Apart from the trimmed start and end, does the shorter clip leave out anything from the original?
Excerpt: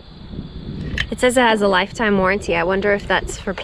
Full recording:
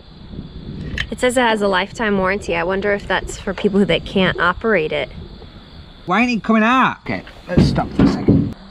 no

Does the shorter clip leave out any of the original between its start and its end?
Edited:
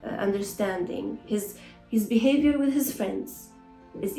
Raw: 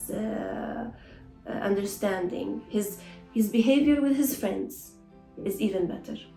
no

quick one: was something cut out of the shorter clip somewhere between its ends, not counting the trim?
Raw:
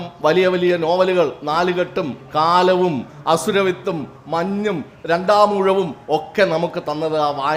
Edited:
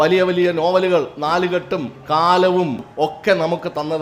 yes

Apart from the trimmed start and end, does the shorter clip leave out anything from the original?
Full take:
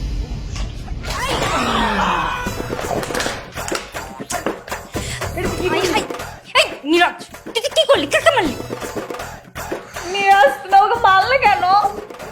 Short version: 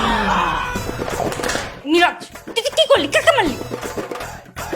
yes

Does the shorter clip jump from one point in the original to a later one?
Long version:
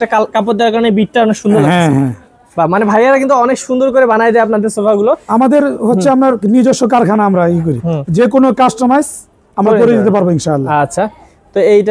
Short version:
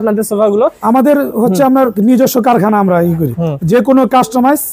no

